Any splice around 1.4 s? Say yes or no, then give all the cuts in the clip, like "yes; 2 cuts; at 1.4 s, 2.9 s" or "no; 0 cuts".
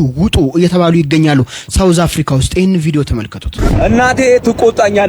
no; 1 cut; at 3.6 s